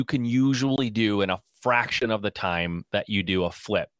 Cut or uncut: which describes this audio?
uncut